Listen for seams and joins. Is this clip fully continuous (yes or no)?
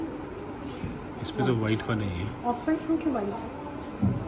yes